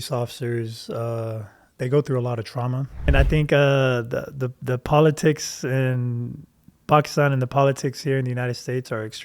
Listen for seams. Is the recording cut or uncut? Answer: cut